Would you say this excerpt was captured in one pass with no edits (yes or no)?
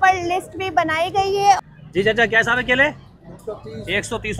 no